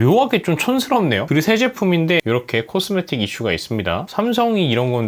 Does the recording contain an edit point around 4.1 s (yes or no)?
yes